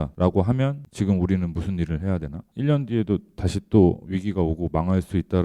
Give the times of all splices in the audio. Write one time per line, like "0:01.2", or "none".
0:02.4